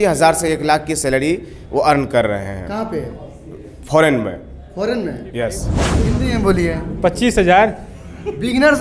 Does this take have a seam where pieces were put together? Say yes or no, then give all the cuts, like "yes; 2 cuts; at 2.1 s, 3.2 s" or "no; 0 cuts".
yes; 1 cut; at 5.8 s